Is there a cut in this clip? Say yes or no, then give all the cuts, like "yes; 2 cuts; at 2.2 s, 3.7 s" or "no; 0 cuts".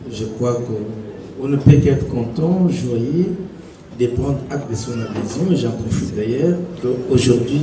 no; 0 cuts